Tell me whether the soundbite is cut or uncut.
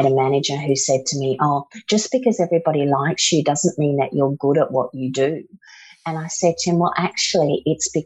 uncut